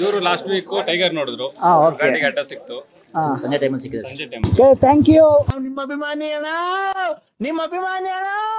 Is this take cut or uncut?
cut